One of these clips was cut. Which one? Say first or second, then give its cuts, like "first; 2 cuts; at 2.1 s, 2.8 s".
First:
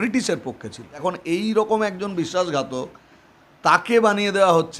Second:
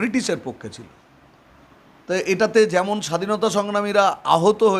first; 1 cut; at 1.0 s